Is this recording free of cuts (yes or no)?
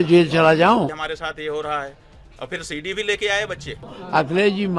no